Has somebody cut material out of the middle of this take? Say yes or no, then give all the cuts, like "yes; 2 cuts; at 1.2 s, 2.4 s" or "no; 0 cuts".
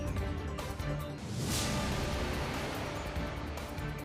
no; 0 cuts